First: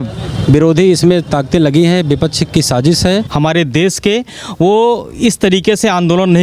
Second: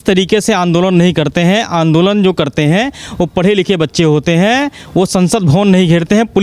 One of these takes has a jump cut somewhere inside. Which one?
first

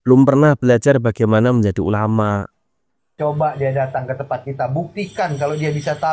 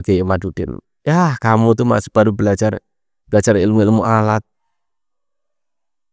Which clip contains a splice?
first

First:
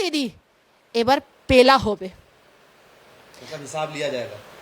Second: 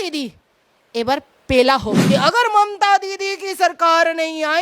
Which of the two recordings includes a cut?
second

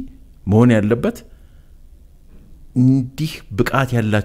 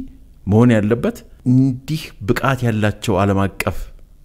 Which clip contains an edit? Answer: second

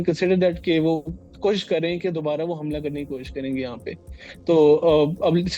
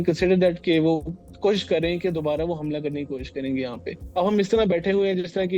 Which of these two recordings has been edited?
second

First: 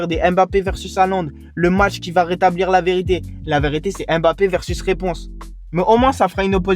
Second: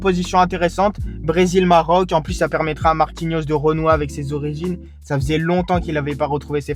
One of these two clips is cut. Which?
first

